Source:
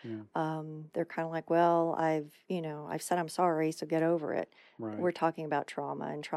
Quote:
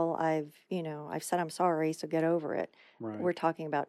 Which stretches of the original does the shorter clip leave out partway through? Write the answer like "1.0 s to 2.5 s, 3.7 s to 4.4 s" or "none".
none